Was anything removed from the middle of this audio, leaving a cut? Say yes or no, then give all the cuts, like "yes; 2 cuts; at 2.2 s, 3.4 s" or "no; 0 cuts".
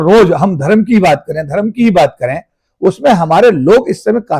yes; 1 cut; at 2.6 s